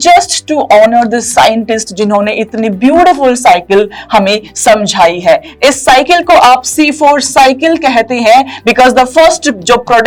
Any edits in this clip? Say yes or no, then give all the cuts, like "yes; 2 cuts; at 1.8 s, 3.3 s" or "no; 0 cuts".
no; 0 cuts